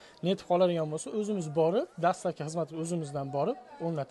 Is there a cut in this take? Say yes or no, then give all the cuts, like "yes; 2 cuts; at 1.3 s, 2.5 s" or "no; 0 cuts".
no; 0 cuts